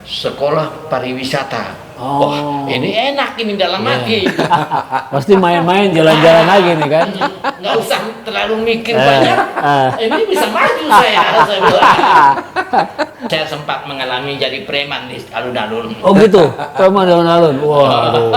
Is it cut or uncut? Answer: cut